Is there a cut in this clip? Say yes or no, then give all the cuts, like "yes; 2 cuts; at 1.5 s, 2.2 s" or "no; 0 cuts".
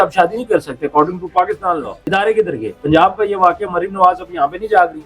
yes; 1 cut; at 2.0 s